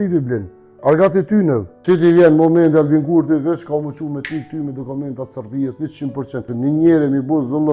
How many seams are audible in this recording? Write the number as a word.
two